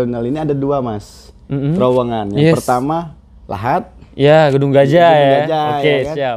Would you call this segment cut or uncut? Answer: uncut